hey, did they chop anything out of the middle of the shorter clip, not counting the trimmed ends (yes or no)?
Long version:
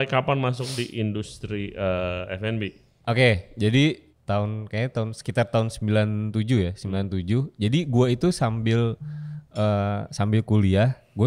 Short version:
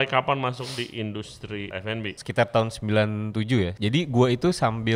yes